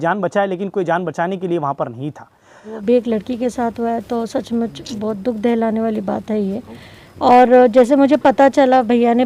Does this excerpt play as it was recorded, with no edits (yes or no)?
no